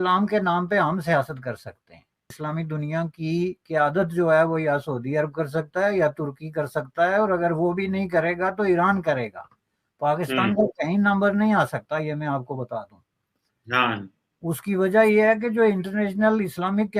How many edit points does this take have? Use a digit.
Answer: 1